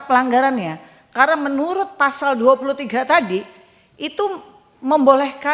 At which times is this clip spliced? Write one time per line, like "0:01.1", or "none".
none